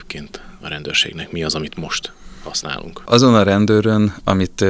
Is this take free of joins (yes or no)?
no